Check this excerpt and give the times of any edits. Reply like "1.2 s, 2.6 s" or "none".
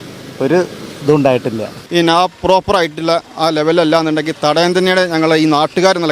1.7 s